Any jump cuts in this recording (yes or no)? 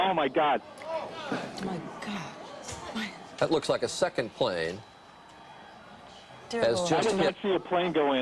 no